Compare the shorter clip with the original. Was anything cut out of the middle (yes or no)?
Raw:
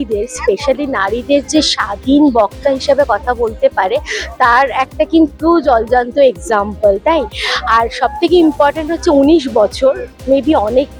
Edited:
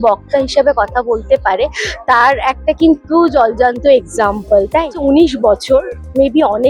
yes